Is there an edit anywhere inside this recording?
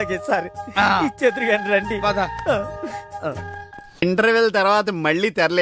yes; 1 cut; at 4.0 s

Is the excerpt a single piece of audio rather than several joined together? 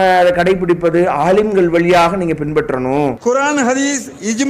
no; 1 cut; at 3.2 s

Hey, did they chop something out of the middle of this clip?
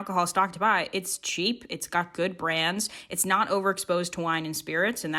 no; 0 cuts

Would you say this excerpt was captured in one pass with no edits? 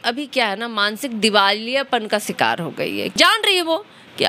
no; 1 cut; at 3.2 s

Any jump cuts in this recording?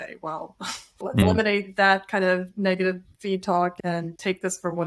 yes; 2 cuts; at 1.2 s, 3.7 s

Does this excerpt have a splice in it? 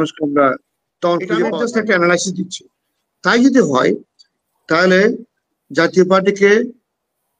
yes; 1 cut; at 1.5 s

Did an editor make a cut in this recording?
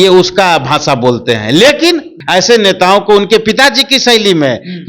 yes; 1 cut; at 2.1 s

